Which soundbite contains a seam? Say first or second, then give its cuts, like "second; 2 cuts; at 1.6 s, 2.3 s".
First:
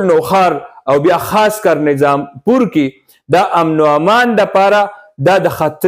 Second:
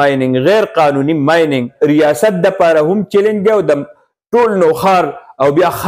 second; 1 cut; at 1.7 s